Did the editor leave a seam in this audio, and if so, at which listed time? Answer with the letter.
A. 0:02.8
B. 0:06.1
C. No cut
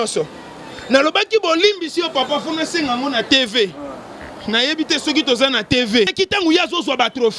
B